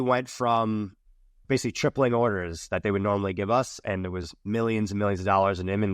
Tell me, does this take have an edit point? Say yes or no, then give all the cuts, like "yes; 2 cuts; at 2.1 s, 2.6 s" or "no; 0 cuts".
yes; 2 cuts; at 1.4 s, 4.0 s